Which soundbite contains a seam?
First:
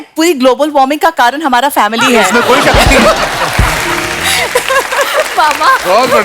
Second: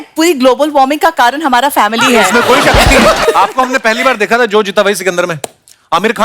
second; 1 cut; at 3.2 s

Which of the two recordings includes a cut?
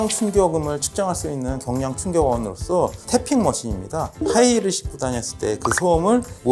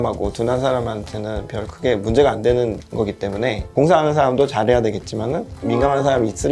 second; 2 cuts; at 3.7 s, 5.5 s

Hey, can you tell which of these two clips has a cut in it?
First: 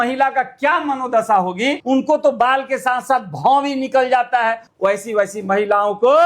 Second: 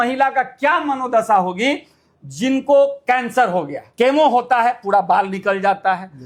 first; 2 cuts; at 1.8 s, 4.7 s

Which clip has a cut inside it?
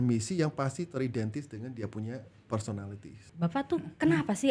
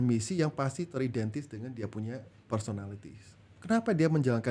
first; 1 cut; at 3.2 s

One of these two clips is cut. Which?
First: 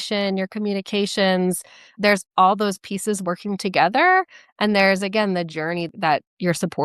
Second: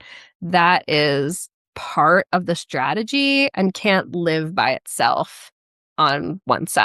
first; 2 cuts; at 1.9 s, 5.9 s

